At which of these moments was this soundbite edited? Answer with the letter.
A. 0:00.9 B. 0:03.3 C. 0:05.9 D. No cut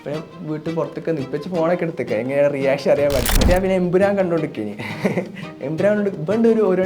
B